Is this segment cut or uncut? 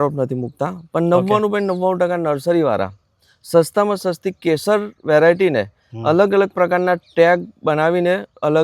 uncut